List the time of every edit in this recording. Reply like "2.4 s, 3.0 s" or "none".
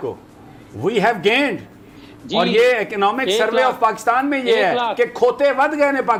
none